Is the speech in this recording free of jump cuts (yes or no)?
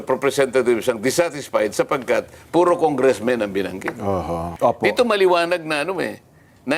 no